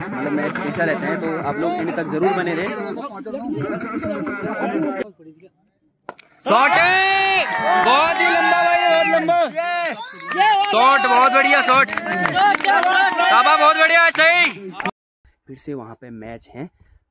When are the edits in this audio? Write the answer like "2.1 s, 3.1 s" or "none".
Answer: 5.0 s, 14.9 s